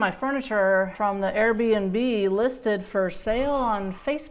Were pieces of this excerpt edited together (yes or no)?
no